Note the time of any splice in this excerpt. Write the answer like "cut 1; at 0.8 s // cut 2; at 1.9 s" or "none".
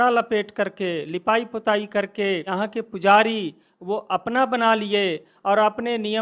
cut 1; at 2.5 s